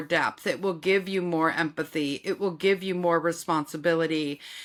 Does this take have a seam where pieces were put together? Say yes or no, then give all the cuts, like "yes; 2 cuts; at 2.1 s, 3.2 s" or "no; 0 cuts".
no; 0 cuts